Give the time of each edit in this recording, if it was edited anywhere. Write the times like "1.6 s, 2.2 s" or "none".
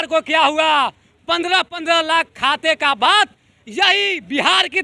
none